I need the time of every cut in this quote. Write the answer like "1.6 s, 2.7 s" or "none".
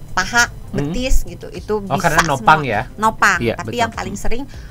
none